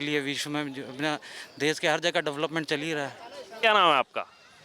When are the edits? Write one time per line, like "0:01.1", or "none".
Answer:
0:03.4